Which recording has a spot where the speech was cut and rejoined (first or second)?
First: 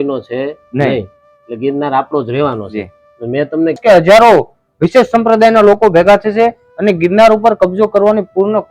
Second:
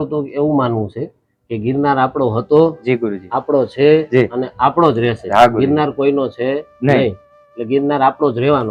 first